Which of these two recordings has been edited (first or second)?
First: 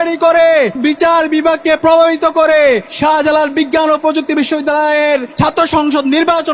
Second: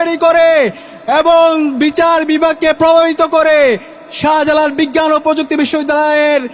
first